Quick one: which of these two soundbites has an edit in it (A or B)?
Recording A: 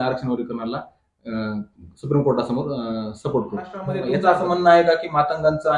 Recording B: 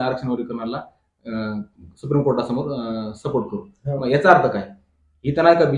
A